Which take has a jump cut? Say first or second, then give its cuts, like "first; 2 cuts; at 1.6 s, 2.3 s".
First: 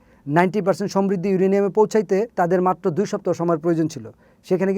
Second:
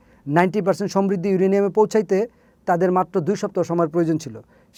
first; 1 cut; at 2.3 s